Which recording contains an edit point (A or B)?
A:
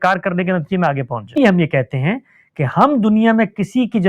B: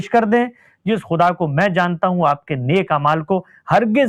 A